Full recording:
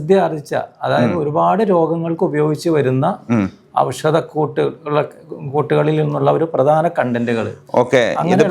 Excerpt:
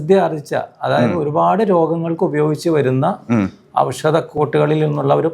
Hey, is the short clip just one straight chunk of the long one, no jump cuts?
no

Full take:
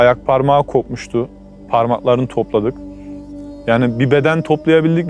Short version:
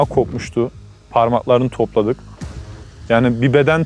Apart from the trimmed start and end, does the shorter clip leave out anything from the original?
no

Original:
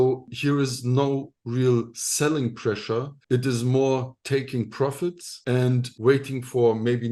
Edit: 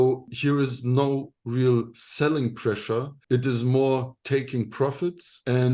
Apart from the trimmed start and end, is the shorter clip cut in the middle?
no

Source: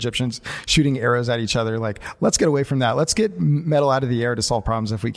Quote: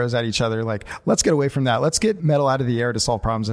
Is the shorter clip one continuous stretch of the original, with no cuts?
no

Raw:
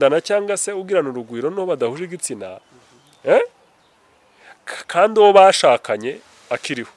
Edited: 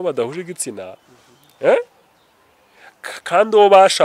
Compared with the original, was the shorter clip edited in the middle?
no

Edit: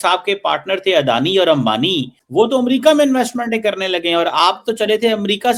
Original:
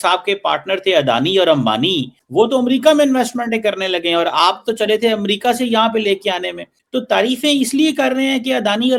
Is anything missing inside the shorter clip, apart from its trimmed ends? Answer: no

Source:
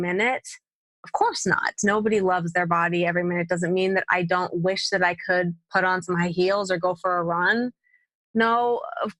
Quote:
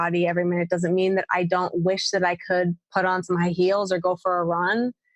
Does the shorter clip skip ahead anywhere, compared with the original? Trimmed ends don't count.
no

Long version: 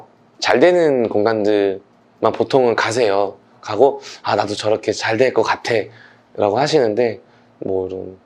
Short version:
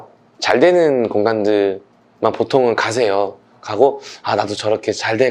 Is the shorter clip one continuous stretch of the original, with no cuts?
yes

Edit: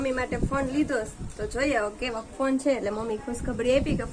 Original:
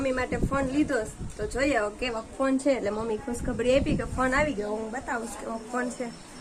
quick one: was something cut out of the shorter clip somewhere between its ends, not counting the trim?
no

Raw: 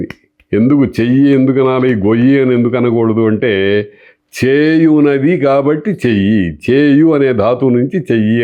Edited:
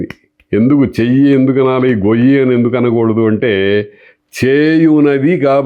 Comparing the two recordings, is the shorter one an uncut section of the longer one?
yes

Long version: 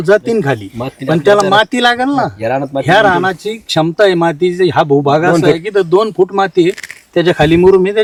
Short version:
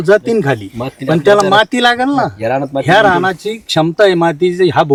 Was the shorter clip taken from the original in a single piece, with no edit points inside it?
yes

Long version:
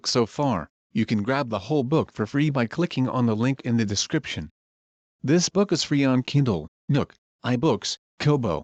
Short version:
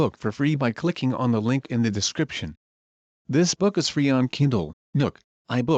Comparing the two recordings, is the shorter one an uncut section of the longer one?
yes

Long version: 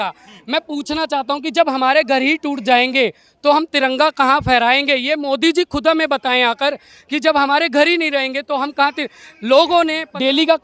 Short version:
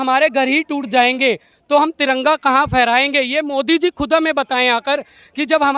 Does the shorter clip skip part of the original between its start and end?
no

